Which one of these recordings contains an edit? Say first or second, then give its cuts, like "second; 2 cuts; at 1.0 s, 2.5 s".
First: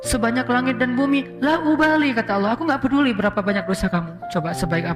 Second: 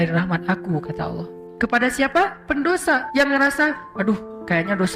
second; 2 cuts; at 1.5 s, 3.1 s